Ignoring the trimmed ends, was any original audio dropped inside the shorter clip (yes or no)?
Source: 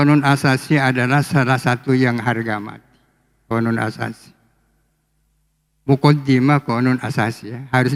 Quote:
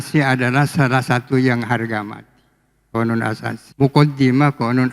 yes